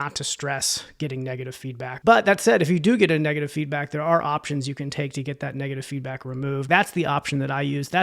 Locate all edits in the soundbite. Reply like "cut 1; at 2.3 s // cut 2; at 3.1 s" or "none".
cut 1; at 1.9 s // cut 2; at 6.6 s